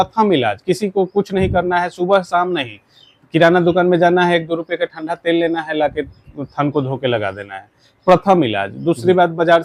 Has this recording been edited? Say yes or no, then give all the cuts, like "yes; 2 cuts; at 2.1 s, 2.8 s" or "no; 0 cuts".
no; 0 cuts